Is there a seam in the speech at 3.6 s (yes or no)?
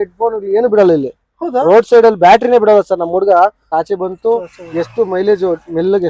yes